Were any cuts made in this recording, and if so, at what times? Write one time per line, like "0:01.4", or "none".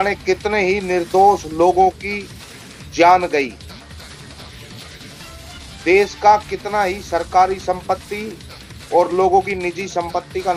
0:04.2
0:05.8